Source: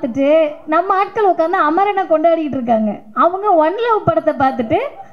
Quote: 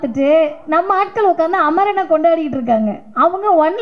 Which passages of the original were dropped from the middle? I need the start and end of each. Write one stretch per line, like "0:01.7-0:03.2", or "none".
none